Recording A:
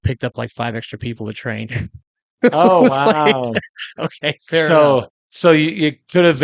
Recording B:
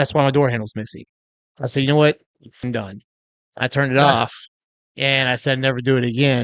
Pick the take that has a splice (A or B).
B